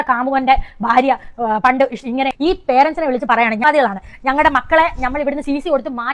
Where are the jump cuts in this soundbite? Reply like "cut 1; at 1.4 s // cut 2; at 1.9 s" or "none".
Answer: cut 1; at 2.3 s